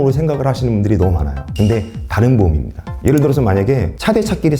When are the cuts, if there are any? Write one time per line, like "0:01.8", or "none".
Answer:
0:02.8